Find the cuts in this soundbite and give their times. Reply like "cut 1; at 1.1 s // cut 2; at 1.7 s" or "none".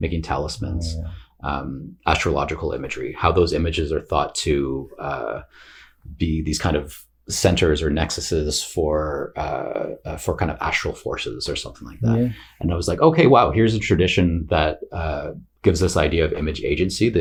none

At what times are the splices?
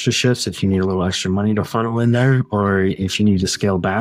none

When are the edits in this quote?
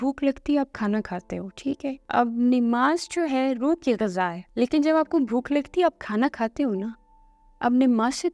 cut 1; at 2.0 s // cut 2; at 4.4 s

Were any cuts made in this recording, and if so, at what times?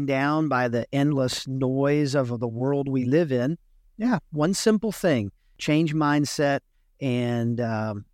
none

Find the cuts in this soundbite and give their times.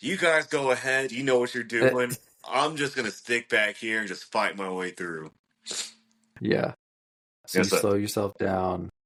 none

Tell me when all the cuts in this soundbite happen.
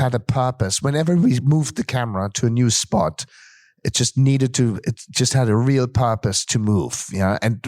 none

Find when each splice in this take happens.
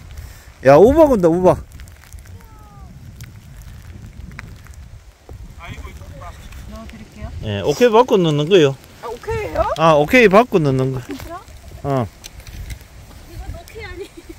cut 1; at 6.6 s

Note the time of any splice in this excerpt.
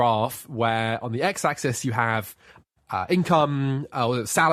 none

